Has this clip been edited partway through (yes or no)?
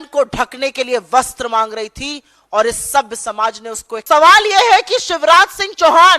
yes